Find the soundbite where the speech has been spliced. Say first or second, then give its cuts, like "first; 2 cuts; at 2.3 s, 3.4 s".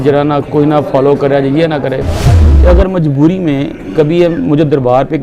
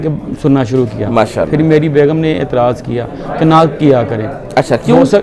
first; 1 cut; at 2.4 s